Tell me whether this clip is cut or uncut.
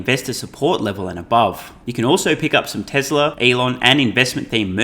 cut